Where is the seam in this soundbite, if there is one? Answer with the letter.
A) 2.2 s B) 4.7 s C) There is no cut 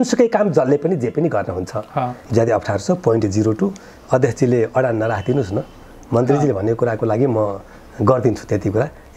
A